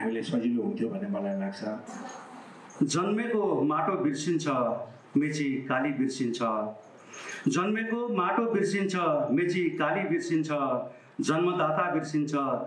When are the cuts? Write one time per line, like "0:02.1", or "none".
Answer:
0:01.9